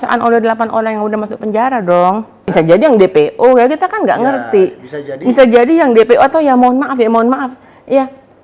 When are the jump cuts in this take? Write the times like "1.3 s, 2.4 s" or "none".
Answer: 2.5 s